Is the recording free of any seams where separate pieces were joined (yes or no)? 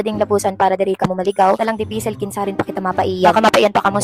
yes